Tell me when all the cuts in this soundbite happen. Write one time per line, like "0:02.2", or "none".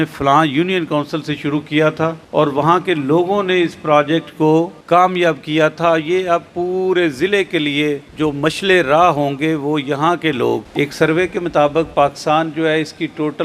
0:02.2
0:04.8
0:08.1
0:10.7